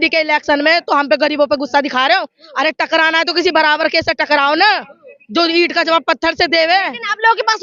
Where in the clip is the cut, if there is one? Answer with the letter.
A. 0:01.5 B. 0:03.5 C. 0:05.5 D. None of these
D